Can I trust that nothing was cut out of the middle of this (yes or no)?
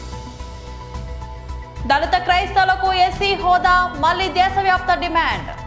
no